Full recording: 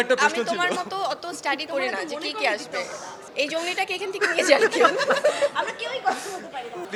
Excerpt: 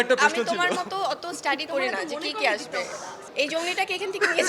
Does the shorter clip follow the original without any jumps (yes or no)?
yes